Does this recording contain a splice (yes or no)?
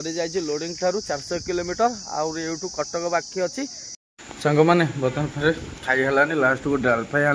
yes